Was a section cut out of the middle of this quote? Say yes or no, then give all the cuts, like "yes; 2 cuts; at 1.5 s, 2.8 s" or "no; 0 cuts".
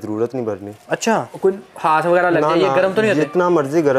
yes; 1 cut; at 1.3 s